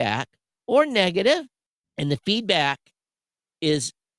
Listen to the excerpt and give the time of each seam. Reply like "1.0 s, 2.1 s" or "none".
1.5 s